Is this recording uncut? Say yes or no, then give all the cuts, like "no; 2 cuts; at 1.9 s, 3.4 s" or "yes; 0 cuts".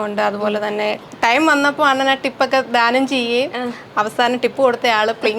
no; 1 cut; at 1.1 s